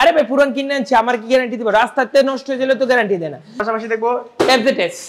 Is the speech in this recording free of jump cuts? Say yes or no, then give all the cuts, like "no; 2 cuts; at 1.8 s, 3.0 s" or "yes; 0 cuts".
no; 1 cut; at 3.6 s